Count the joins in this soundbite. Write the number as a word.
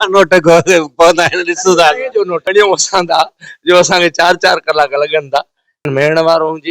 two